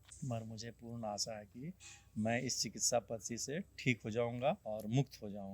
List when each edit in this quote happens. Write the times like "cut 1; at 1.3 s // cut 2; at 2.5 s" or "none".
cut 1; at 4.6 s